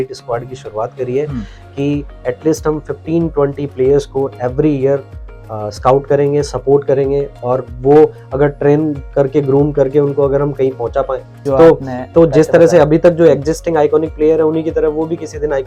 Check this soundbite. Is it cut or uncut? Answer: cut